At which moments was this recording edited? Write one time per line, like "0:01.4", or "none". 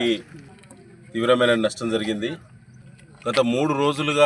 none